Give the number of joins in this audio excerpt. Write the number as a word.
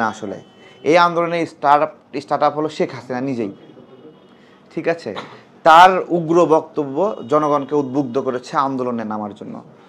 zero